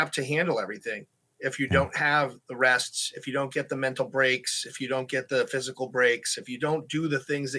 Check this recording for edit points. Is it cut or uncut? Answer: uncut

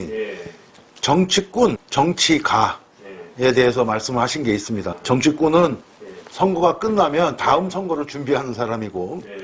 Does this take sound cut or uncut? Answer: cut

